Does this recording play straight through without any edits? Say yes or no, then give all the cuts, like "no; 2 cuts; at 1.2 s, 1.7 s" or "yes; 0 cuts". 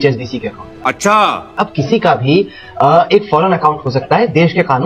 yes; 0 cuts